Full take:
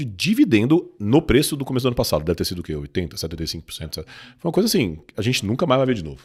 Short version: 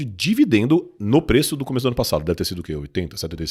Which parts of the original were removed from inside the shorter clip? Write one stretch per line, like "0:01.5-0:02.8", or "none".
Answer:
none